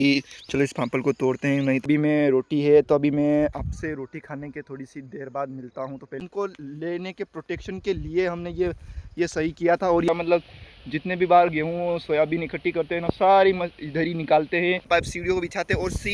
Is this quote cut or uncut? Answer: cut